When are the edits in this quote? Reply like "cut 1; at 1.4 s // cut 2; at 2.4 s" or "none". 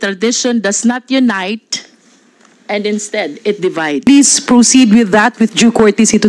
cut 1; at 4.1 s